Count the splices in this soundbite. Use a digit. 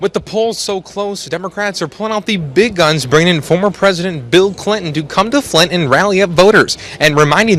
0